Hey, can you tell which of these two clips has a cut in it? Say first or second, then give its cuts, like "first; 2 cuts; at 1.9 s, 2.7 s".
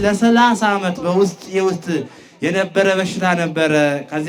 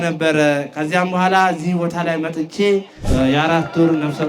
second; 1 cut; at 3.1 s